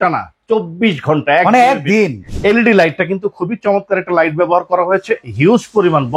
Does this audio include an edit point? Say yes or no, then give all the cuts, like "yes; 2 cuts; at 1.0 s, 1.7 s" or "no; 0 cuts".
yes; 1 cut; at 2.2 s